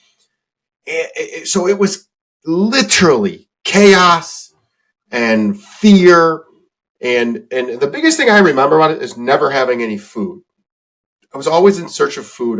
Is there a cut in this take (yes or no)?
no